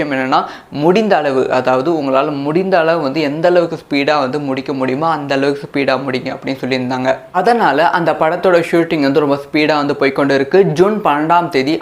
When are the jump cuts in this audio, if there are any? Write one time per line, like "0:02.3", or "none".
0:07.3